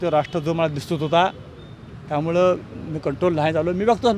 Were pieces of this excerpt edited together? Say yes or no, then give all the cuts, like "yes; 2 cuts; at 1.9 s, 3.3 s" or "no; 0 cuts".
no; 0 cuts